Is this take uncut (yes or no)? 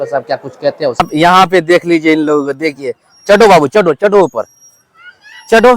no